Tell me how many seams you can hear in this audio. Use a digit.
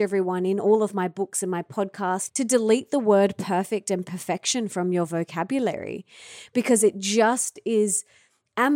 1